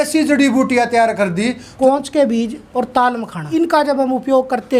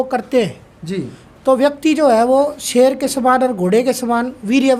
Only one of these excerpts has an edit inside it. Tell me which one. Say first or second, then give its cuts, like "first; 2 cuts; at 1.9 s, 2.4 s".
first; 3 cuts; at 1.7 s, 2.6 s, 3.4 s